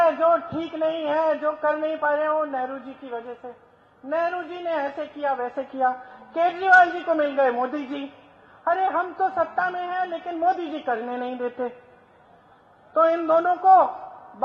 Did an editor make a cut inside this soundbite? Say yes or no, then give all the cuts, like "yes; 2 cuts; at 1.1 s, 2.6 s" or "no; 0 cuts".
no; 0 cuts